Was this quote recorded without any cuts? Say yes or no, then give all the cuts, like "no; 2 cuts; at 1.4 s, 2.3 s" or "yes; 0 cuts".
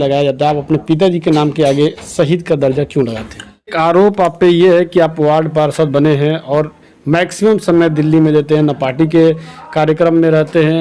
no; 1 cut; at 3.7 s